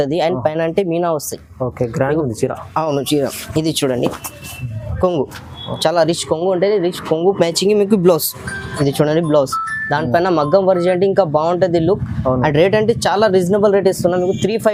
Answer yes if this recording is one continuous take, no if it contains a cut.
yes